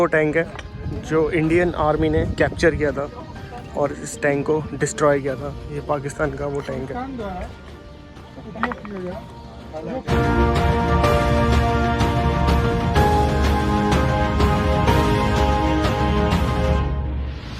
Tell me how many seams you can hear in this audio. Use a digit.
0